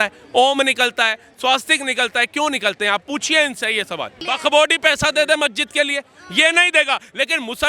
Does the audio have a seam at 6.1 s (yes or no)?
no